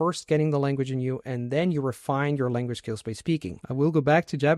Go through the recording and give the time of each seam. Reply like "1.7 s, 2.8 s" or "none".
3.6 s